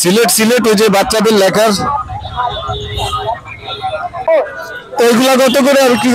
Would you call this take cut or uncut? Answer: cut